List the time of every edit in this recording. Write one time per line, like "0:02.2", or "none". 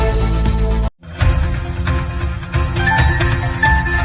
none